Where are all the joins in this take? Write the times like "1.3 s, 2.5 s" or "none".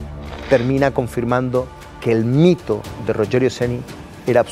none